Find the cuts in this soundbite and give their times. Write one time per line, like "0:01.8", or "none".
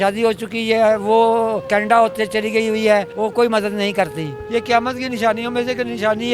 0:03.1
0:04.4